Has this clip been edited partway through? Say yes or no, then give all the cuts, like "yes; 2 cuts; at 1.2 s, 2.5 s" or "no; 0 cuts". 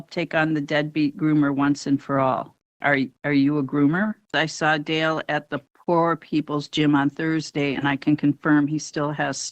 yes; 2 cuts; at 2.8 s, 4.3 s